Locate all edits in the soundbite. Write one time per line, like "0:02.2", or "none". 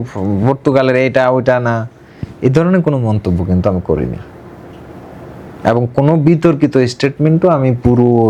none

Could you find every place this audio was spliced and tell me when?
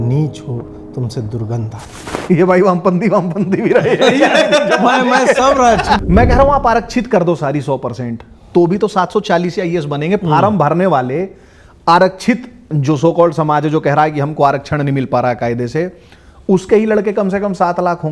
0:06.0

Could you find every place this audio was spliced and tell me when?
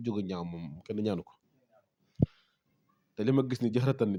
none

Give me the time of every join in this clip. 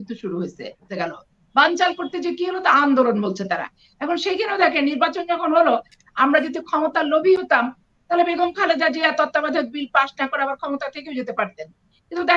none

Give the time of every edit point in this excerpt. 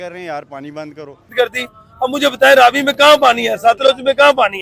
0:01.3

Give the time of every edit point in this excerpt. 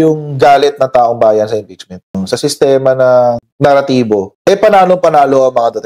0:02.1

